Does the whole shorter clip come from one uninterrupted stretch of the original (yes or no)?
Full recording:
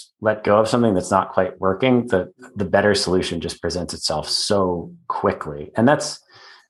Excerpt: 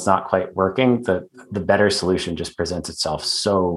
yes